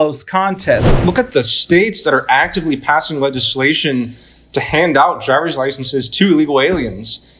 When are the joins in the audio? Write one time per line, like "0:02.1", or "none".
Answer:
0:00.9